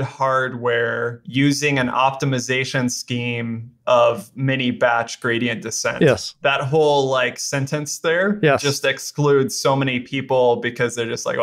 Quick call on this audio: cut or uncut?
cut